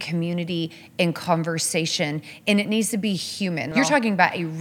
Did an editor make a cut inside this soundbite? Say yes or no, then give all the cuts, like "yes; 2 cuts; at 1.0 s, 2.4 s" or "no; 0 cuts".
yes; 1 cut; at 3.7 s